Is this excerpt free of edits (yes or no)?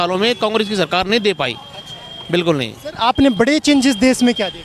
yes